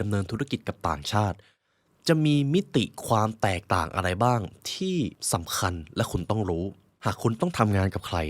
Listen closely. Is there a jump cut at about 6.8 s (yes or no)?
yes